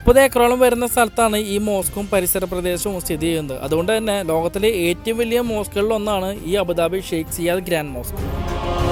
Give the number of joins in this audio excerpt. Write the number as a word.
zero